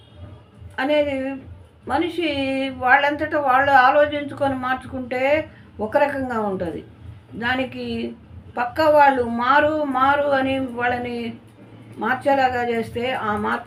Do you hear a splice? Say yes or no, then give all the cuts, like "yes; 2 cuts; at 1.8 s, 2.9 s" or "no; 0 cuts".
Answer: no; 0 cuts